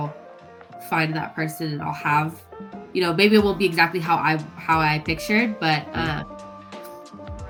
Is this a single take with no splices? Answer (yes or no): yes